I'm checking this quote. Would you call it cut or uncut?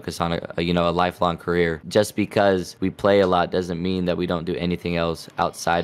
cut